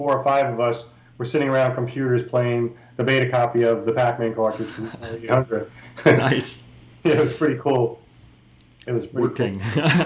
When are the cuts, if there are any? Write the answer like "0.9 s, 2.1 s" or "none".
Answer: none